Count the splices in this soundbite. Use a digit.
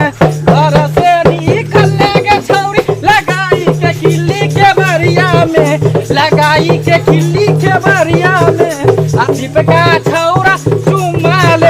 1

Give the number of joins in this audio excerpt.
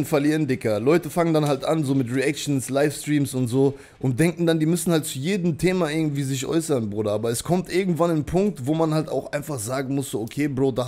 0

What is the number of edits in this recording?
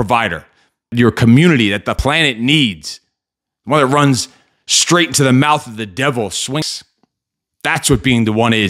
3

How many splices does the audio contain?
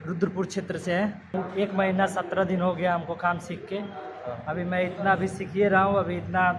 1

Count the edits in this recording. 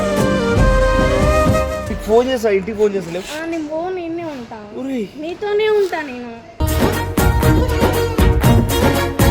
1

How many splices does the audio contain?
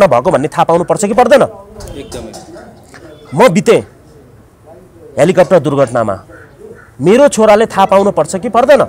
0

